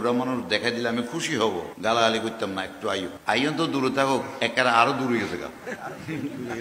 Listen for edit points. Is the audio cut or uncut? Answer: cut